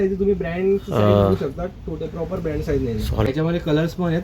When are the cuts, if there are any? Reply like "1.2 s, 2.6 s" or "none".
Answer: 3.3 s

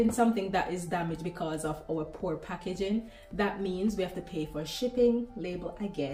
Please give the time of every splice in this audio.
none

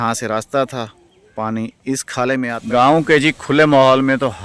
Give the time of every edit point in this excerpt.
2.6 s

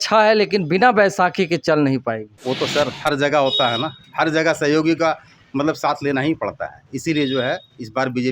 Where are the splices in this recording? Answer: 2.3 s

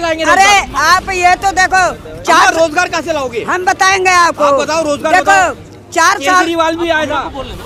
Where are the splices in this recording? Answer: none

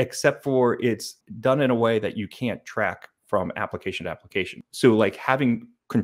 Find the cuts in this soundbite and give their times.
1.2 s, 4.6 s

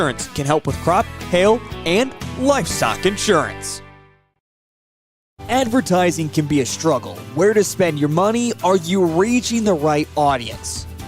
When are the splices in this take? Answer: 4.6 s

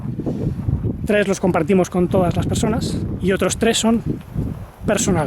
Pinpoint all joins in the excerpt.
3.1 s

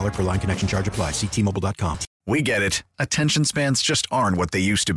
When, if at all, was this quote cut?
2.1 s

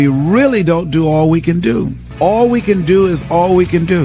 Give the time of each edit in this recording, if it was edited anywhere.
2.1 s

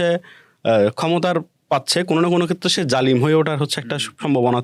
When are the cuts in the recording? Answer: none

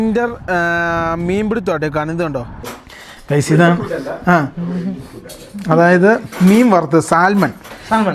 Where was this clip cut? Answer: 3.1 s

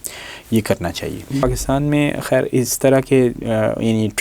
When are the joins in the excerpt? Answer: 1.4 s

